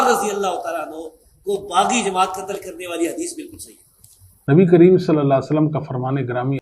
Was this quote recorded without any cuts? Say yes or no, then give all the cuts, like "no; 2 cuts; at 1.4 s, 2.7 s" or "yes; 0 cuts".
no; 1 cut; at 4.3 s